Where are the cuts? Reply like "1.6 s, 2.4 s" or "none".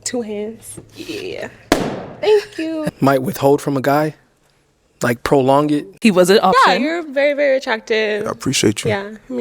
2.9 s, 5.9 s